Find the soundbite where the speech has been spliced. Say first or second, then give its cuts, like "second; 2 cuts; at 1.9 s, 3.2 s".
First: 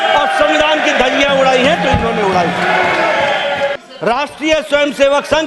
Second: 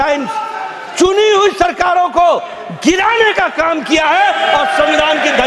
first; 1 cut; at 3.7 s